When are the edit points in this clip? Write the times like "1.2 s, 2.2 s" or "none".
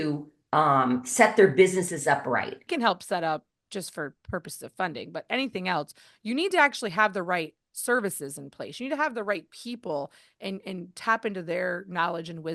2.6 s